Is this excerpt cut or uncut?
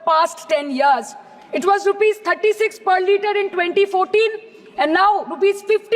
uncut